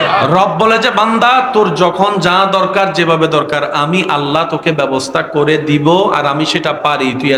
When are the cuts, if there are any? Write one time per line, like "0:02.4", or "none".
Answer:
none